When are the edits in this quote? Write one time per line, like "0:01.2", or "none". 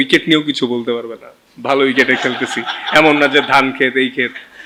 none